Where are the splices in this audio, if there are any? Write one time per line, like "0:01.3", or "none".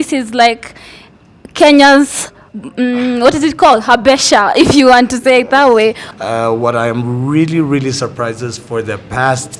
0:06.0